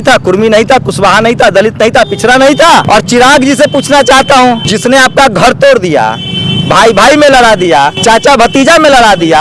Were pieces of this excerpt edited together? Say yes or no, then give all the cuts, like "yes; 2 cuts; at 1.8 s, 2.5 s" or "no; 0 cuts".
yes; 3 cuts; at 2.9 s, 4.7 s, 8.0 s